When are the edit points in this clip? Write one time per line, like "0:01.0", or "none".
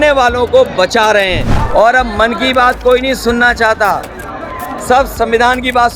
0:01.5

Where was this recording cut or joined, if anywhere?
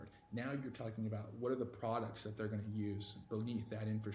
none

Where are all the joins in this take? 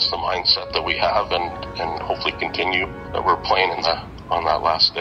0:03.0

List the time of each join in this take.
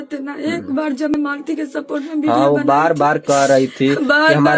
0:01.1

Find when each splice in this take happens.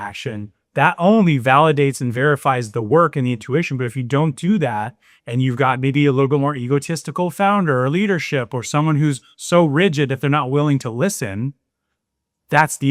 none

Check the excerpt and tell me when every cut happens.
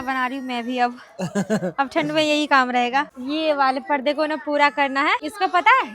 0:03.2
0:05.2

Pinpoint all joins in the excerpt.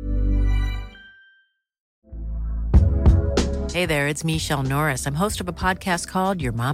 0:01.9

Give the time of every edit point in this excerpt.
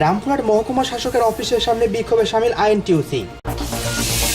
0:03.4

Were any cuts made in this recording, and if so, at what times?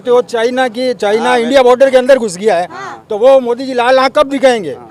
none

